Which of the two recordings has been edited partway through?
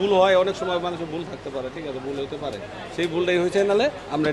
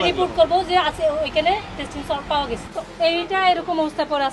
second; 1 cut; at 2.7 s

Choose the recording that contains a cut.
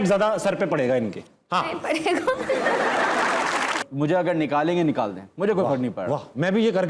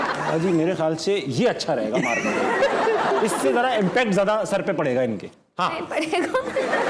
first; 1 cut; at 3.9 s

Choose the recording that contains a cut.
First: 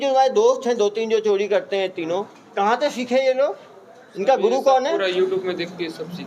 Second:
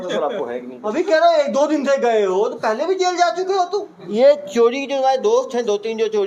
second; 1 cut; at 4.0 s

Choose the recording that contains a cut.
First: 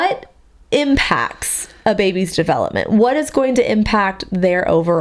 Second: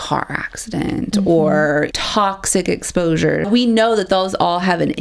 second; 2 cuts; at 1.9 s, 3.5 s

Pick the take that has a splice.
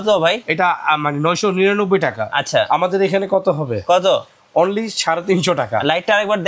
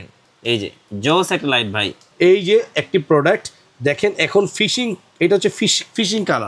second; 1 cut; at 2.0 s

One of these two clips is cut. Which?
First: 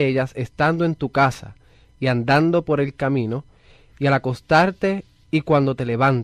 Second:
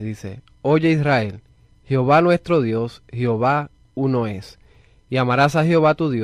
first; 1 cut; at 5.2 s

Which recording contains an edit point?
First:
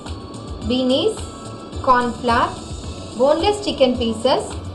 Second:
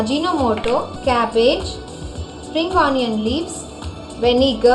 second; 1 cut; at 0.9 s

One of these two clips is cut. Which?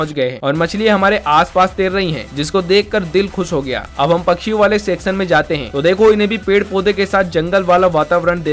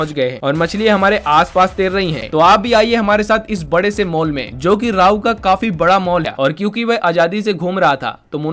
second; 2 cuts; at 2.2 s, 6.3 s

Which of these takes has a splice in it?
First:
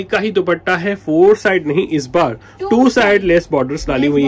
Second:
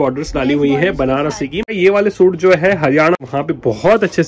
second; 2 cuts; at 1.7 s, 3.2 s

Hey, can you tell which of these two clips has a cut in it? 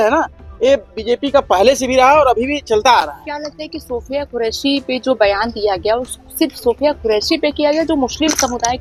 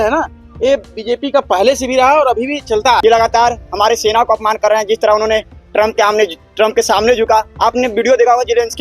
second; 1 cut; at 3.0 s

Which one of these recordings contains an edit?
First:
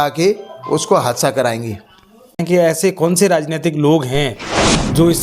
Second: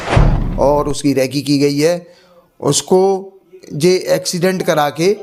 first; 1 cut; at 2.4 s

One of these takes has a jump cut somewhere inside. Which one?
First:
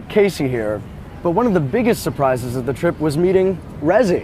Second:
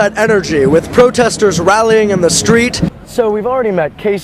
second; 1 cut; at 2.9 s

